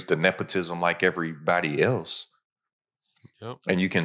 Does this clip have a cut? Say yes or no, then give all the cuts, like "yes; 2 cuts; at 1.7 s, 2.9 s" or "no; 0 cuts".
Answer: no; 0 cuts